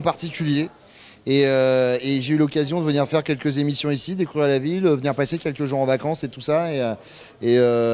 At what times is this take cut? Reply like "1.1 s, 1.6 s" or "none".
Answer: 5.0 s